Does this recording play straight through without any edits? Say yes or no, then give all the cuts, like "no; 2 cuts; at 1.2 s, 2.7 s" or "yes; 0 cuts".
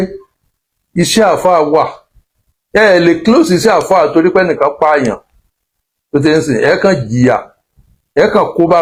yes; 0 cuts